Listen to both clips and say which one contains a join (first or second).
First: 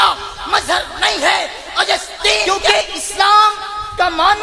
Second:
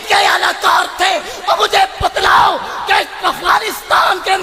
first